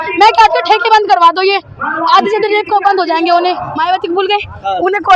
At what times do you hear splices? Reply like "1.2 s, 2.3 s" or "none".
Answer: 3.7 s